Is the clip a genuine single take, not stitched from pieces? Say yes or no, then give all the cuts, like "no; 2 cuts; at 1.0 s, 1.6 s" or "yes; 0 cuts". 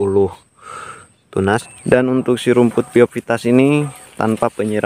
no; 1 cut; at 1.6 s